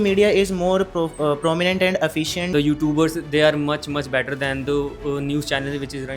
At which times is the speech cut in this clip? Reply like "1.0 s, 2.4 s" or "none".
2.5 s